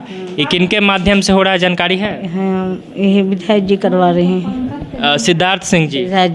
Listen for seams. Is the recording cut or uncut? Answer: uncut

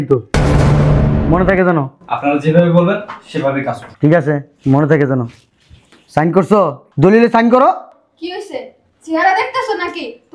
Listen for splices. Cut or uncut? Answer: cut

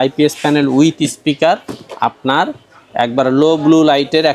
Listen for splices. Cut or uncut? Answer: uncut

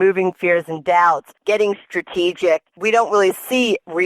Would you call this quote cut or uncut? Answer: cut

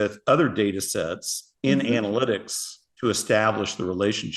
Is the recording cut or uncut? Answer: uncut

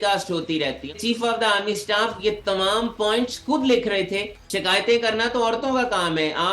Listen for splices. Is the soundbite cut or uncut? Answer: cut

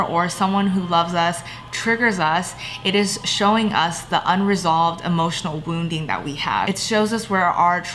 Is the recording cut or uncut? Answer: cut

